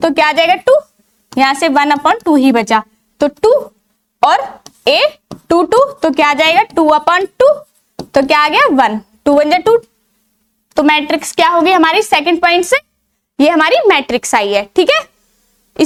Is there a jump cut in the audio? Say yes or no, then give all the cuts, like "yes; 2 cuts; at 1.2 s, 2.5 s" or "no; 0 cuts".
no; 0 cuts